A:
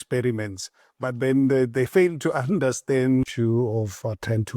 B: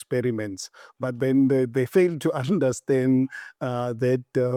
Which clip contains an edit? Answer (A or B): A